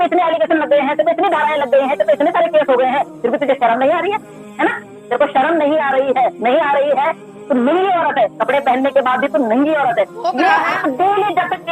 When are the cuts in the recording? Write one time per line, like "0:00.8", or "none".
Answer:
none